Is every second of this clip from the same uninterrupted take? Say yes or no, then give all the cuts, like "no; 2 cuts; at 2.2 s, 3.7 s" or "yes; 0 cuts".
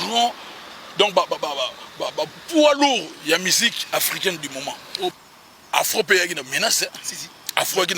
no; 1 cut; at 5.1 s